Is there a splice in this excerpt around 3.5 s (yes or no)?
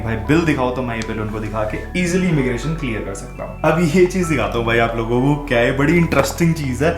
yes